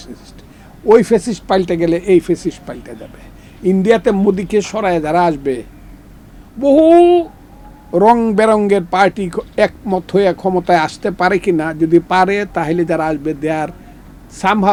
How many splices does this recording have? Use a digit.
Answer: 0